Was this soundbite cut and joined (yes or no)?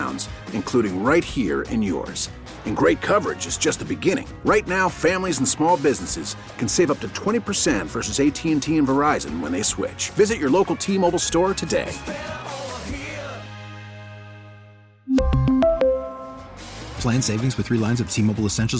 no